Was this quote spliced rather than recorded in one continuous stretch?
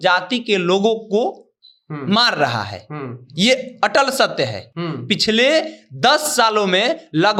no; 0 cuts

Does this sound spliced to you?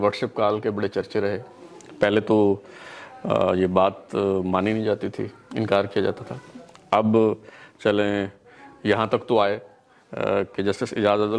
no; 0 cuts

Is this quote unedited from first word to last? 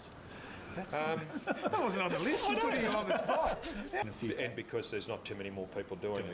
no; 1 cut; at 3.8 s

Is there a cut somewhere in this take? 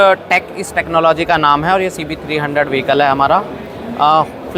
no; 0 cuts

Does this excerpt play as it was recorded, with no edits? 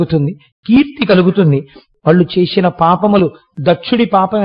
no; 1 cut; at 1.9 s

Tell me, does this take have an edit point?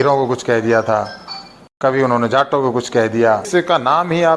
yes; 1 cut; at 3.5 s

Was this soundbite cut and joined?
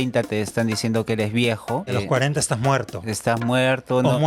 yes; 1 cut; at 1.9 s

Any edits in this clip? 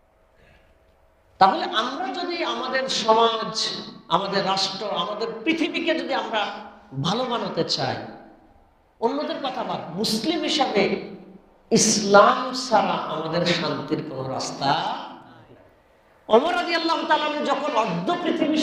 yes; 1 cut; at 16.3 s

